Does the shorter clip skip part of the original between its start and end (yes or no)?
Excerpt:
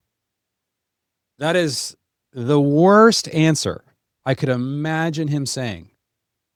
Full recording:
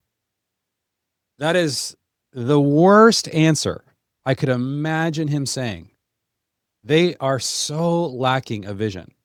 no